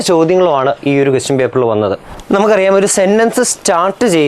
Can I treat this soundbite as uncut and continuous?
no; 1 cut; at 2.1 s

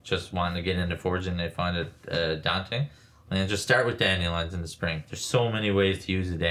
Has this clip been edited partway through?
yes; 1 cut; at 5.1 s

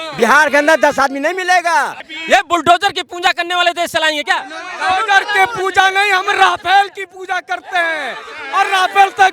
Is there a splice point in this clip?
yes; 1 cut; at 2.1 s

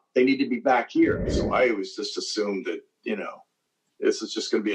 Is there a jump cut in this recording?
yes; 1 cut; at 1.4 s

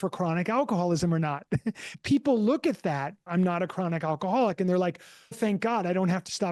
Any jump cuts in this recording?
yes; 3 cuts; at 1.9 s, 3.3 s, 5.4 s

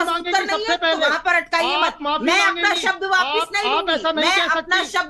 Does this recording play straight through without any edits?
yes; 0 cuts

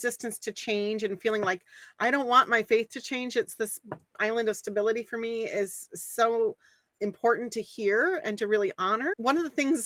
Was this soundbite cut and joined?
no; 0 cuts

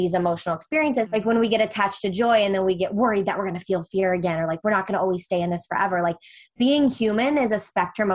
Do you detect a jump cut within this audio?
yes; 1 cut; at 1.1 s

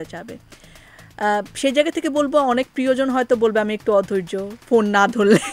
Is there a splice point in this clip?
no; 0 cuts

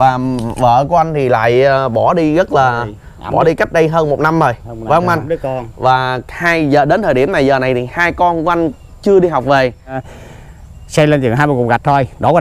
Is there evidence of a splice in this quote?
yes; 1 cut; at 10.1 s

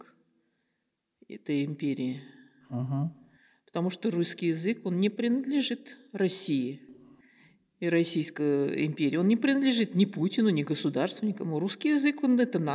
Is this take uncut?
yes; 0 cuts

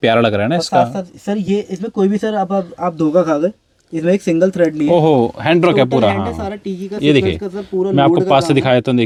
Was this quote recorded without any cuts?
yes; 0 cuts

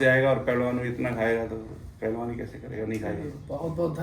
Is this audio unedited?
yes; 0 cuts

